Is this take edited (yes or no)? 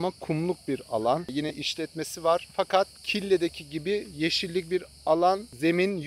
yes